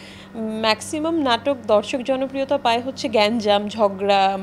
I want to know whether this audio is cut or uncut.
uncut